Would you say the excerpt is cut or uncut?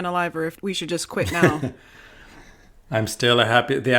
cut